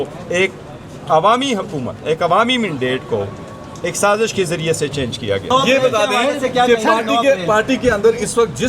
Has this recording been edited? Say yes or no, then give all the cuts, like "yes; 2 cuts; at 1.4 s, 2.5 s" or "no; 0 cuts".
no; 0 cuts